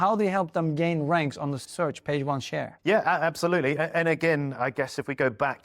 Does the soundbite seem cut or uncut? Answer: cut